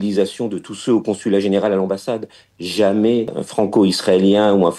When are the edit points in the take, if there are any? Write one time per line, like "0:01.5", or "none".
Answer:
0:03.4